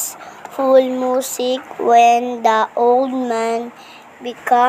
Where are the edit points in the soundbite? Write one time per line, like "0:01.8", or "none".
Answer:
0:01.9
0:03.1